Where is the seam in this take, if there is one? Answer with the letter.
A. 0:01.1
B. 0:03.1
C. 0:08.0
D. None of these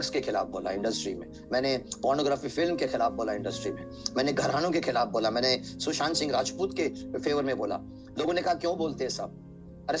D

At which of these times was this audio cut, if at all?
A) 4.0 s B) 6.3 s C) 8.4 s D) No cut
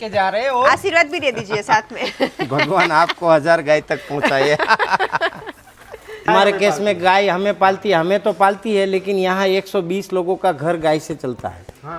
B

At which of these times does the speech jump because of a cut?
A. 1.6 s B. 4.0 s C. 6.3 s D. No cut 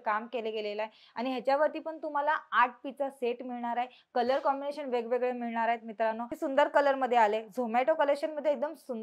C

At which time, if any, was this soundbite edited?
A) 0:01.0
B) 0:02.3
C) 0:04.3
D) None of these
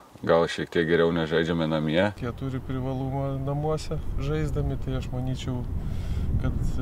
B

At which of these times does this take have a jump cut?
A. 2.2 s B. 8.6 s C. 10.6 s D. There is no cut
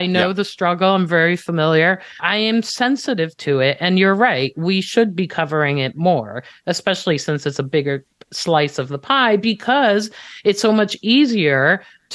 A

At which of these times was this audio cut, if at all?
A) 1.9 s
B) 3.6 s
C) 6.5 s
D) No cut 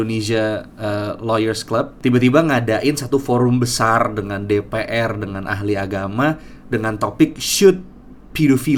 A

